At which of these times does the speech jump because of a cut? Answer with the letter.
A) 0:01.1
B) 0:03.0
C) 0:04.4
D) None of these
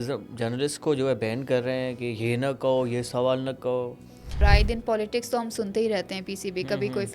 C